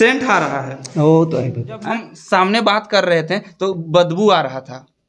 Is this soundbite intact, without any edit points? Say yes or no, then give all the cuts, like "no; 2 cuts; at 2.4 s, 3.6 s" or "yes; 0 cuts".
no; 1 cut; at 1.8 s